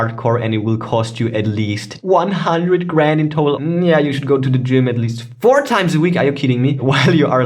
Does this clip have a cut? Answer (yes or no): yes